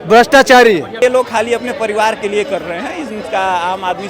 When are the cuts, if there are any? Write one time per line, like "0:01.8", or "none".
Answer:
0:01.0

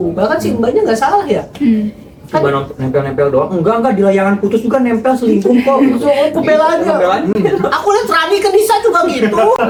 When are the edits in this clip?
none

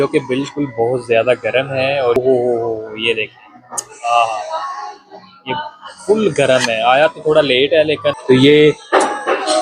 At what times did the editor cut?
0:02.2
0:08.2

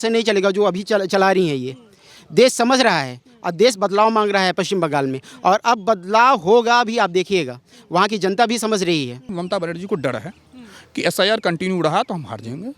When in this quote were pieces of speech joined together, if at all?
0:09.3

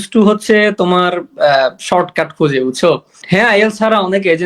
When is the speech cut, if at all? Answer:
0:03.1

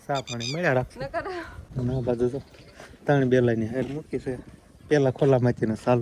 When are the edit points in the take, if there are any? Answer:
0:01.6

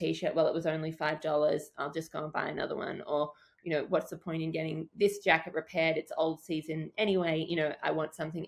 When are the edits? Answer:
none

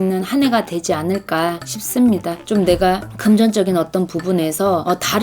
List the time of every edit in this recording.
0:02.4

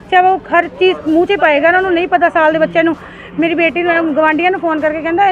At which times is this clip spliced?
none

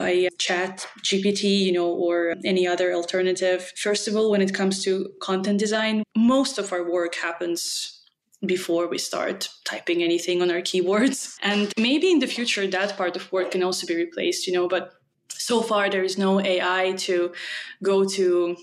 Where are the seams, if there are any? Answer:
0:03.7
0:11.5

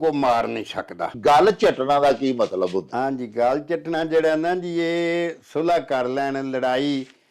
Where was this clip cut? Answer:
0:01.1

